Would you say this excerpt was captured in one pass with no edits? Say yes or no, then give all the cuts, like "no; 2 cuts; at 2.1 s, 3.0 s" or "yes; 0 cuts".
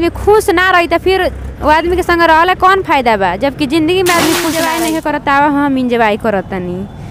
no; 1 cut; at 4.6 s